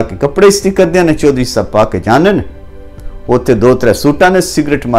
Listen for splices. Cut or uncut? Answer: uncut